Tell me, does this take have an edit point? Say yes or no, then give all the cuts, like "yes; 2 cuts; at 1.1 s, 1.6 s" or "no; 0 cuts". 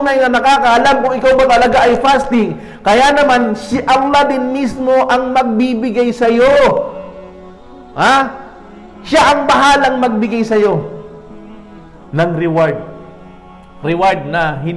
no; 0 cuts